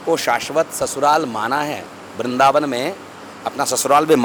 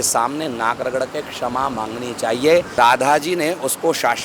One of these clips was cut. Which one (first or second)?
second